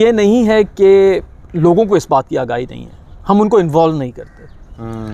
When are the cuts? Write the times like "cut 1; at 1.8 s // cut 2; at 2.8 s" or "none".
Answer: none